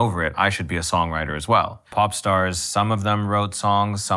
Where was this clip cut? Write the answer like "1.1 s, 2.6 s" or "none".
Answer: 1.8 s